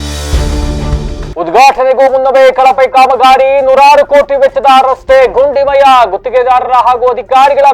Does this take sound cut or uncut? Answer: cut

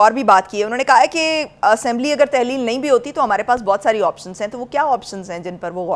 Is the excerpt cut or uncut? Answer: uncut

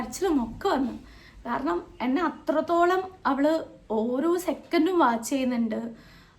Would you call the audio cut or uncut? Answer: uncut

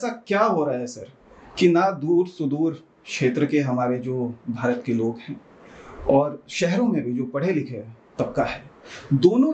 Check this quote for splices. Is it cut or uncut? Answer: uncut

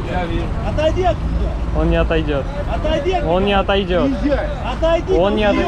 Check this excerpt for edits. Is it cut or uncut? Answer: uncut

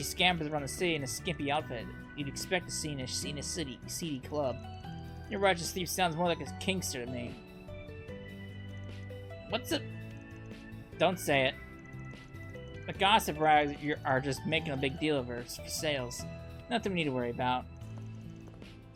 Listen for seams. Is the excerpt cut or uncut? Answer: uncut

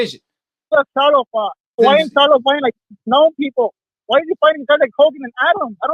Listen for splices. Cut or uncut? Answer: cut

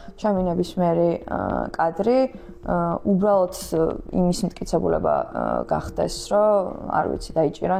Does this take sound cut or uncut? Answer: uncut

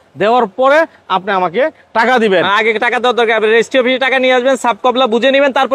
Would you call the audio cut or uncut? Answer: uncut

